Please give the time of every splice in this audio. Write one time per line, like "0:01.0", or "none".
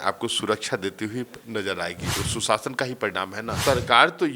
0:02.2
0:03.6

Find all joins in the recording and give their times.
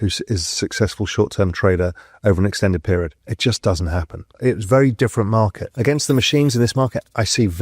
0:03.2
0:04.3
0:05.7

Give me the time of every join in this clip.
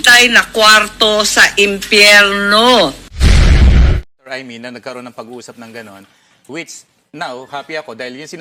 0:04.1

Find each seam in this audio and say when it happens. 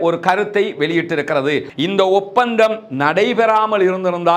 0:01.7

